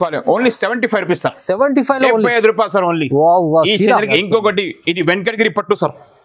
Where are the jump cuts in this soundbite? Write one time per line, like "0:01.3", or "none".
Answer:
0:04.0